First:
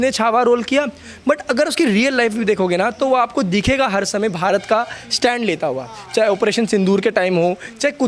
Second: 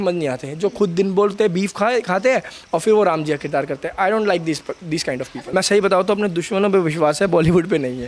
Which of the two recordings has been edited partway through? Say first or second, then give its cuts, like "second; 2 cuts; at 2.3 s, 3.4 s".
second; 1 cut; at 5.4 s